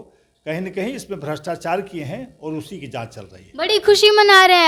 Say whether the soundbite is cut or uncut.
uncut